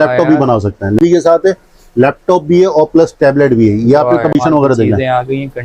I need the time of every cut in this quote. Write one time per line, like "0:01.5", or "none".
0:01.0
0:04.3